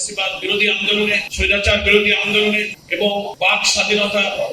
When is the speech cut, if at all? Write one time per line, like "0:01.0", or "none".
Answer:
0:01.3
0:03.0